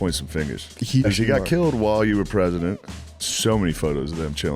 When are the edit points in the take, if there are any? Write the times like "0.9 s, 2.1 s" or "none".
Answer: 1.1 s, 3.3 s